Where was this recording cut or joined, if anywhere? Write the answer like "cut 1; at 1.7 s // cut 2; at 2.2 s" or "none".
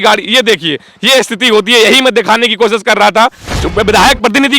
cut 1; at 3.4 s